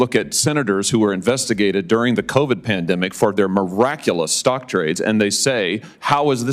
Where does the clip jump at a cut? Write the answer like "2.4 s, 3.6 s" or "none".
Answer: none